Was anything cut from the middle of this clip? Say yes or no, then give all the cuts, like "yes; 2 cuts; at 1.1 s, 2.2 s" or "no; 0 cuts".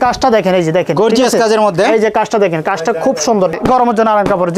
yes; 1 cut; at 3.5 s